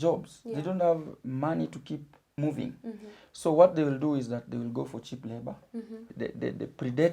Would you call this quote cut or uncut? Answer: cut